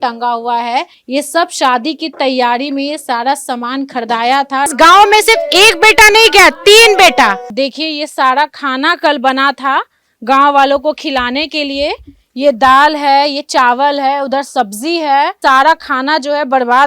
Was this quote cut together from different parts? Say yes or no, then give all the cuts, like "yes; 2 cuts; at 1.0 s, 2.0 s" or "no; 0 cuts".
yes; 4 cuts; at 1.0 s, 4.7 s, 7.5 s, 15.4 s